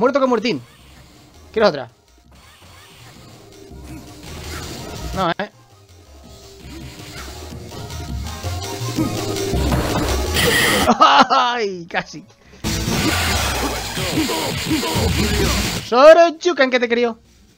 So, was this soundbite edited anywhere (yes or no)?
yes